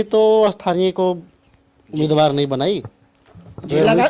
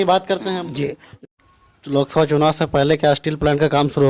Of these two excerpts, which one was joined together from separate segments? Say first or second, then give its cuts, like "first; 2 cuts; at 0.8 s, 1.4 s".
second; 1 cut; at 1.1 s